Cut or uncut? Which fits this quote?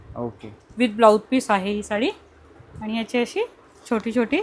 uncut